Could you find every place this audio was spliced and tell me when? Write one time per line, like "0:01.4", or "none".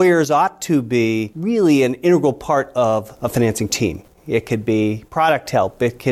0:01.3
0:04.1